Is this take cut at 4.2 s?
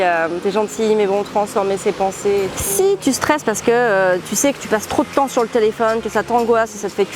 no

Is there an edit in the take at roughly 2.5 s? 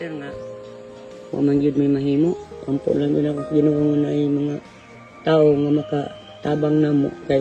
yes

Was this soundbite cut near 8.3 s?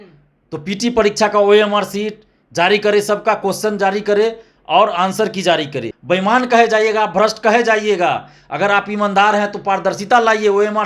no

